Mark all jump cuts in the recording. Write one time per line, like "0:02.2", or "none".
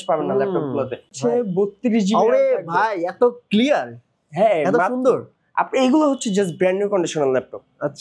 0:01.1

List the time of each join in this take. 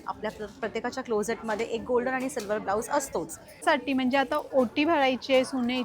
0:03.6

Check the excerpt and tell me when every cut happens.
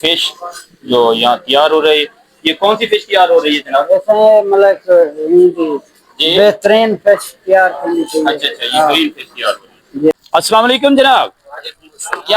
0:10.1

